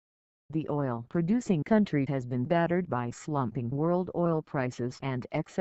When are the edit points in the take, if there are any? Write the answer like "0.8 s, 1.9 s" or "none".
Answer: 3.7 s